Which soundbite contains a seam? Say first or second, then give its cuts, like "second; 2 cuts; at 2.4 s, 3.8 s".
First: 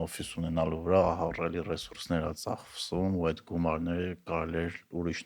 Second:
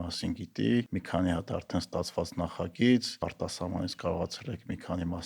second; 2 cuts; at 1.0 s, 3.2 s